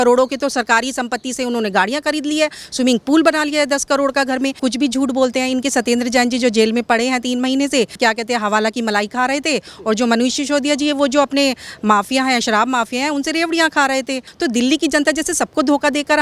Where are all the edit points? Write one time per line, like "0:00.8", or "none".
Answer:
0:04.6
0:14.3